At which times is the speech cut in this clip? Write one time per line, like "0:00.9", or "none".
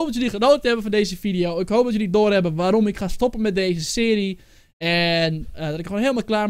none